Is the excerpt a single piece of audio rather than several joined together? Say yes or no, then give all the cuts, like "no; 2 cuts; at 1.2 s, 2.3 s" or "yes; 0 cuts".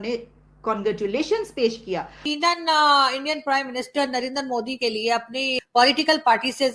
no; 2 cuts; at 2.3 s, 5.6 s